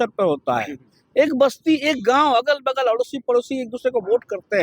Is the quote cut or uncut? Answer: uncut